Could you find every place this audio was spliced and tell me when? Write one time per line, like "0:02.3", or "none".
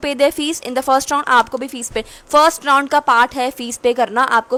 none